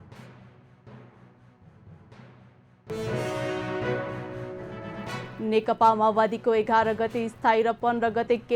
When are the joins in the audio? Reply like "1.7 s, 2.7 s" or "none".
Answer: 1.2 s, 2.9 s, 5.3 s